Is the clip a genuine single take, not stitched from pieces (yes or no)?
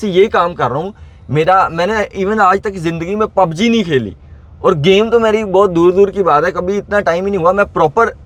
yes